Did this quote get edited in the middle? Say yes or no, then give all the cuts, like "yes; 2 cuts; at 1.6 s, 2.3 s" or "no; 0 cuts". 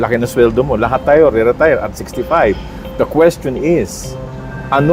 no; 0 cuts